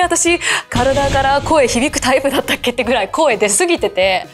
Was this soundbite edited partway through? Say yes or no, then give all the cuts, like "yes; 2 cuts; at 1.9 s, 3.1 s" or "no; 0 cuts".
no; 0 cuts